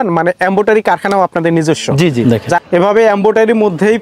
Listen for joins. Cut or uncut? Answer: cut